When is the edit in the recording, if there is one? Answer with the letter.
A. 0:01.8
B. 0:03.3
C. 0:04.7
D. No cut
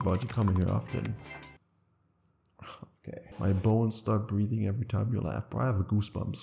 B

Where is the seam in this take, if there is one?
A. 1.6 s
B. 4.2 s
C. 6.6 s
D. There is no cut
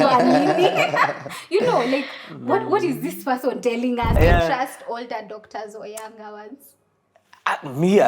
B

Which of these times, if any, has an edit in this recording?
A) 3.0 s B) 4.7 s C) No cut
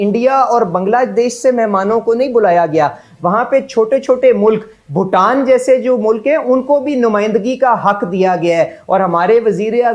C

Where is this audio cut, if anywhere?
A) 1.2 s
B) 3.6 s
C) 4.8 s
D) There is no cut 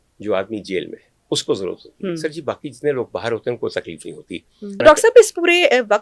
C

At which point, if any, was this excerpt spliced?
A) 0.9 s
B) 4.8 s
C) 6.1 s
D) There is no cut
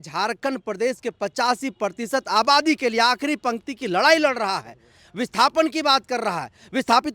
D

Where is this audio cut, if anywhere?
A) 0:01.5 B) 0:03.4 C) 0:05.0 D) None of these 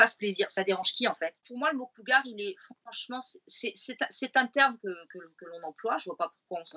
A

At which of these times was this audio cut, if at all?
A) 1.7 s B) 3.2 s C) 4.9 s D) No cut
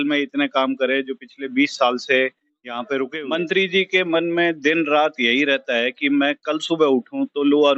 B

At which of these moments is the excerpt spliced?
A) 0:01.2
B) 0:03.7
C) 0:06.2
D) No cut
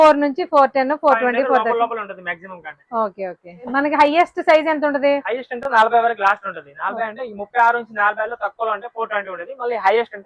B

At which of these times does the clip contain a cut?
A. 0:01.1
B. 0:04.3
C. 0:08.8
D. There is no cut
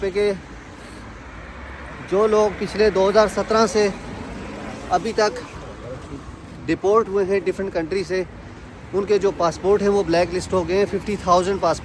D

